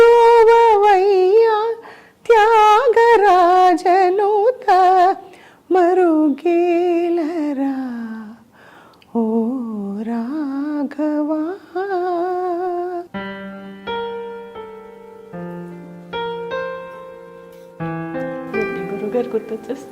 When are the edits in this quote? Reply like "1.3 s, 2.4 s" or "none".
13.1 s